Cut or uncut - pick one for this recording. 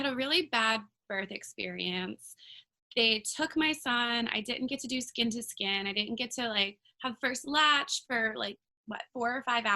uncut